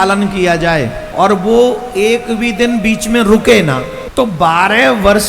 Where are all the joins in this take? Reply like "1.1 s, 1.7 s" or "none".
1.1 s, 4.0 s